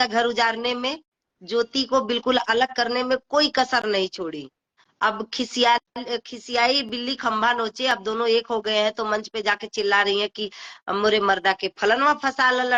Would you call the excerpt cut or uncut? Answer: uncut